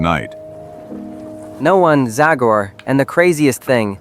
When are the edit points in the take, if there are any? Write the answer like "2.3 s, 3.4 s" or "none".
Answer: 1.5 s